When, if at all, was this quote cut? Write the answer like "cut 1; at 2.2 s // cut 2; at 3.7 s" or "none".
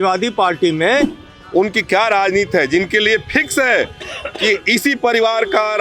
cut 1; at 1.2 s